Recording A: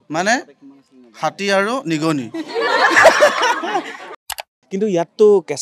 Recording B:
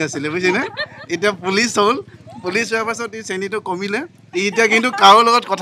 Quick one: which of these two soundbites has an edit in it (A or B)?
A